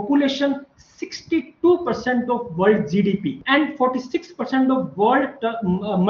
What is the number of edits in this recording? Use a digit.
1